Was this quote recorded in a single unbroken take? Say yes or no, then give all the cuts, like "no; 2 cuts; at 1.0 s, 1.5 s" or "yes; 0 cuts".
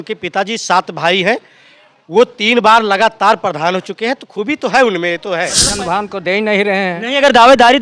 no; 1 cut; at 5.6 s